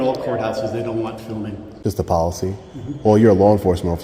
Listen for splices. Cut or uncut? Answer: cut